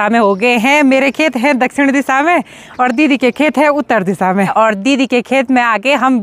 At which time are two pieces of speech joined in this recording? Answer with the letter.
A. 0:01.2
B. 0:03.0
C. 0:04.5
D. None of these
C